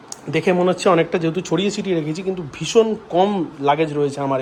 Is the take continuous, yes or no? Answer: yes